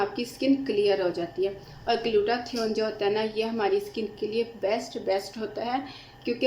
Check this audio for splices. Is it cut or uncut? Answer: uncut